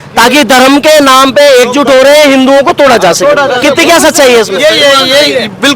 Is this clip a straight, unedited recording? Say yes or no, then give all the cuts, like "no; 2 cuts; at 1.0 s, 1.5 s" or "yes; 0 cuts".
yes; 0 cuts